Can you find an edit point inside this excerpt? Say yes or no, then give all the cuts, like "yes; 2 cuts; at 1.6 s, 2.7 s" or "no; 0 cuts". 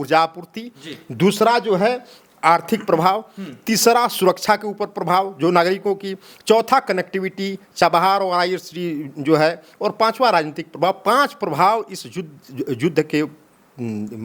no; 0 cuts